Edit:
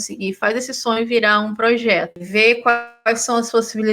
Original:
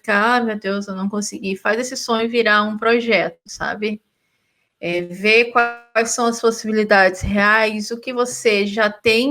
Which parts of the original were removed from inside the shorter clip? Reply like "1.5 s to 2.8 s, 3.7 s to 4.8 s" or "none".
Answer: 3.4 s to 5.1 s